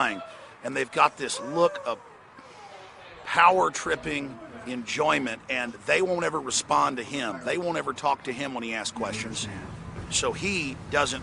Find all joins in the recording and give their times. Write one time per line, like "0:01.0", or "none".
0:08.6